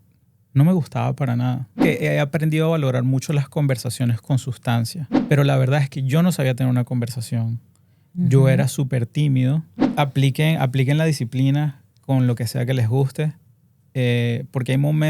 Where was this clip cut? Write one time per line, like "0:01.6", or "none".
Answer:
0:01.8
0:05.1
0:09.8